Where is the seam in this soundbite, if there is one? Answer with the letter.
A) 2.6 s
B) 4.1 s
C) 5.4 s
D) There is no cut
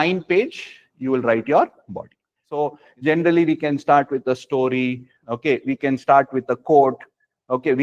A